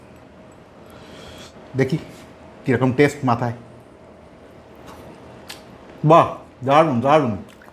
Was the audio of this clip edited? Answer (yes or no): yes